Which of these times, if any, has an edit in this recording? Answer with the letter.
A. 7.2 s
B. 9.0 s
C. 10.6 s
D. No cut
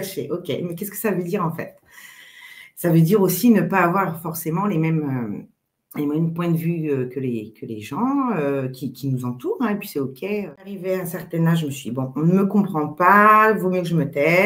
C